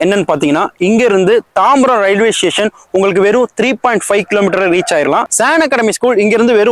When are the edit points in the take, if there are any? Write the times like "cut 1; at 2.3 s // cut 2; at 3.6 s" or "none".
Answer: cut 1; at 5.3 s